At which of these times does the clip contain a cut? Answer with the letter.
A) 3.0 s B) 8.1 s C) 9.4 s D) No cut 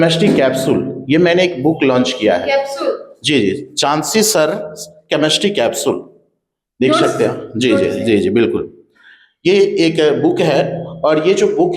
D